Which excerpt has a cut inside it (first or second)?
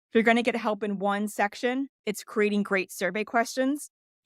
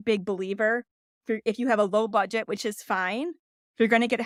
first